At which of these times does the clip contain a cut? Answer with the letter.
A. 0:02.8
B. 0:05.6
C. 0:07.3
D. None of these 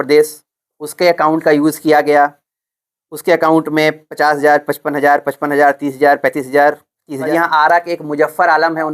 C